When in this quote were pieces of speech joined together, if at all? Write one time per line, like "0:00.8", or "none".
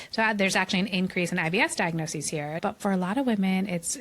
0:02.6